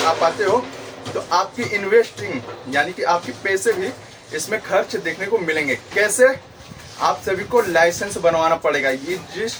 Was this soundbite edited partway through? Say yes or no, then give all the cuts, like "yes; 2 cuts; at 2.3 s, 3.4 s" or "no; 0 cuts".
no; 0 cuts